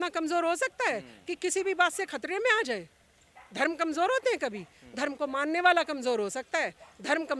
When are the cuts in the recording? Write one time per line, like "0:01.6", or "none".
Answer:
none